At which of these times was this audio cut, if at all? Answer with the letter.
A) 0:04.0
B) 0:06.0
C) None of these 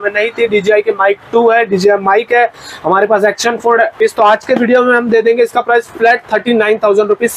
A